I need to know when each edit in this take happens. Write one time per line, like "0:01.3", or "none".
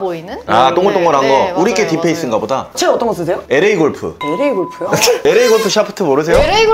0:05.2